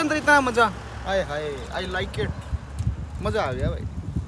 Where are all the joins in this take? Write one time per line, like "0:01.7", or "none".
none